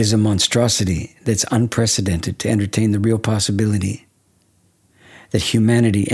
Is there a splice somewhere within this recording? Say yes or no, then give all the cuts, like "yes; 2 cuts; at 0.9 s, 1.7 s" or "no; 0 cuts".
no; 0 cuts